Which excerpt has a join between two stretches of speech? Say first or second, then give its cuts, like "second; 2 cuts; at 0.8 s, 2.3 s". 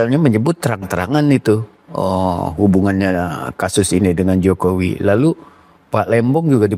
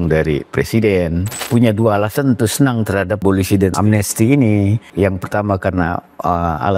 second; 3 cuts; at 1.4 s, 3.3 s, 4.8 s